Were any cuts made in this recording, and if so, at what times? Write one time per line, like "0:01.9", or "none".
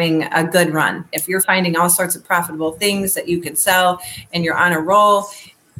0:01.1